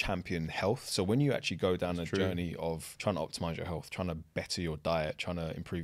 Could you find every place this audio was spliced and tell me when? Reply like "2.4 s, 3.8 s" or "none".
2.9 s